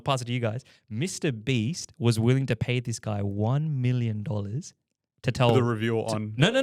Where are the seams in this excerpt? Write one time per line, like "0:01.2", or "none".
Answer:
none